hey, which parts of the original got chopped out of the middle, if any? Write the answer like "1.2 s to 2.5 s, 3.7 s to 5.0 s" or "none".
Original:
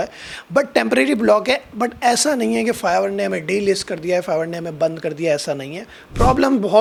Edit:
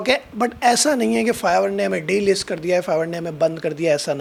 none